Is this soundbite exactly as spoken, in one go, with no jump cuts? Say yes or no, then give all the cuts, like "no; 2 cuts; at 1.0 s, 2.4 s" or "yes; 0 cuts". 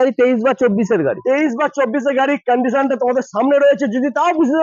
yes; 0 cuts